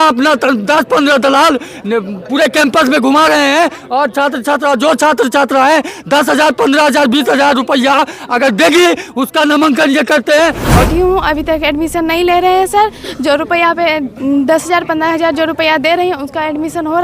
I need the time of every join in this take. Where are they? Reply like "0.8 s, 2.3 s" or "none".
10.9 s